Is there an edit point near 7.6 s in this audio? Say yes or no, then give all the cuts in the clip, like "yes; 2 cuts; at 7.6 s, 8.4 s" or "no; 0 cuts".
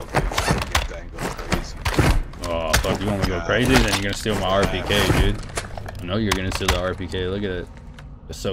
no; 0 cuts